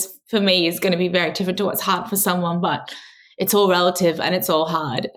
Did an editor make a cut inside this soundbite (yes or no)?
no